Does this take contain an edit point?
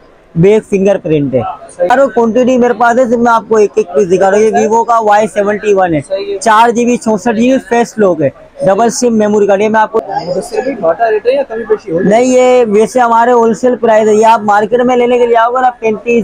yes; 2 cuts; at 1.9 s, 9.9 s

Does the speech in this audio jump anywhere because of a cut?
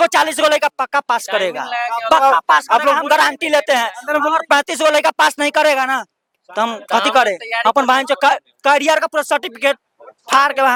no; 0 cuts

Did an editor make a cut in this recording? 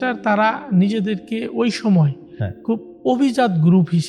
no; 0 cuts

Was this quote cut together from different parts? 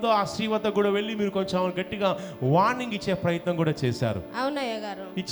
no; 0 cuts

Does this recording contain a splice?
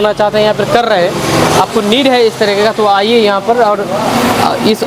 no; 0 cuts

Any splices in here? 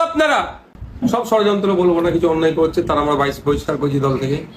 yes; 1 cut; at 1.2 s

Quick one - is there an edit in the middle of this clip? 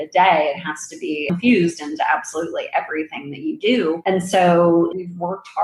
yes; 1 cut; at 1.3 s

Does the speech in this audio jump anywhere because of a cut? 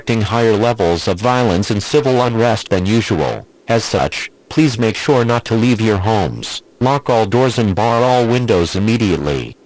no; 0 cuts

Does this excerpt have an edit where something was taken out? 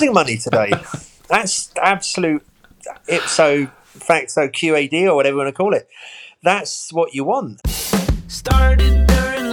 yes; 1 cut; at 7.6 s

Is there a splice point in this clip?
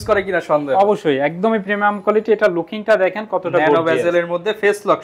no; 0 cuts

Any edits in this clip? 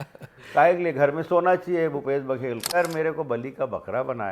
yes; 1 cut; at 2.7 s

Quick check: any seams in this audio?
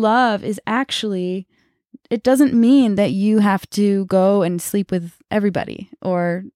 no; 0 cuts

